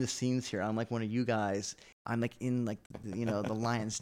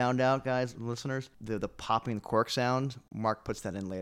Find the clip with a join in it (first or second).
second